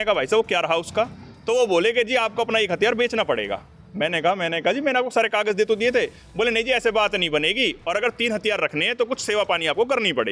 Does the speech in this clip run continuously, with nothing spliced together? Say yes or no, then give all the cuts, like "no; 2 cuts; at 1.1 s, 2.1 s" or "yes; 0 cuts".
yes; 0 cuts